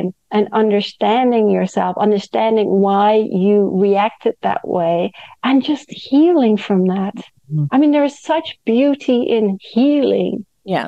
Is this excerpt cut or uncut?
uncut